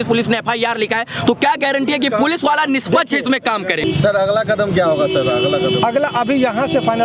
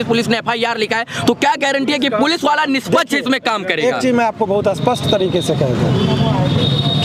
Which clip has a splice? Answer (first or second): first